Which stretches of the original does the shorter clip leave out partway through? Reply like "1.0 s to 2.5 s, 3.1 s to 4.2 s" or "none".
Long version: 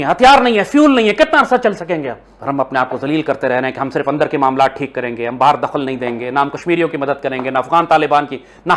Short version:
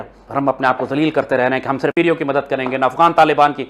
4.0 s to 6.6 s